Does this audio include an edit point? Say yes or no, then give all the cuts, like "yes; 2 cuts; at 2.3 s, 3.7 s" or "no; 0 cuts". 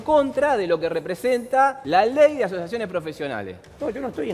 yes; 1 cut; at 1.8 s